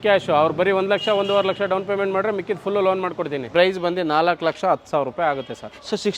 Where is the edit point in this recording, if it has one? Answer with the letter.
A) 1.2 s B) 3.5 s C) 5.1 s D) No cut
B